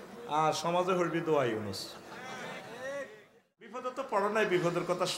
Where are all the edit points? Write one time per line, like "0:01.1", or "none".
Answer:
0:03.9